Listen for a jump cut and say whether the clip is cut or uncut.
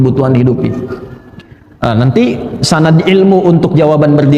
uncut